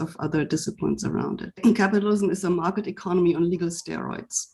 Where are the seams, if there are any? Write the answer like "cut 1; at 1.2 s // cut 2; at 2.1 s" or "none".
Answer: cut 1; at 1.6 s